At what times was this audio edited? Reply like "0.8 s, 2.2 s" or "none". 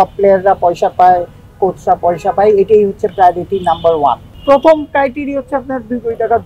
4.3 s

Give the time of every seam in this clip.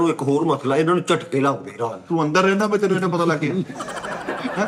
none

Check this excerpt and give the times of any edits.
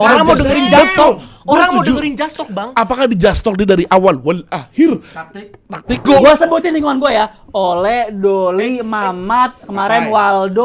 6.0 s

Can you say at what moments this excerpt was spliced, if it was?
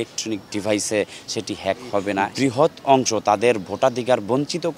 2.3 s

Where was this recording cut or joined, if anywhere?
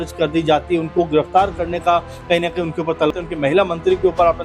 3.1 s

